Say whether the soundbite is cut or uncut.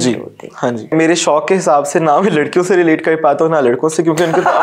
cut